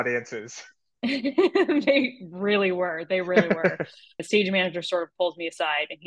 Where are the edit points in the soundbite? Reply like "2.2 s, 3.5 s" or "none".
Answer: 4.2 s